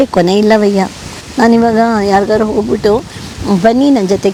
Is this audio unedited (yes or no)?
yes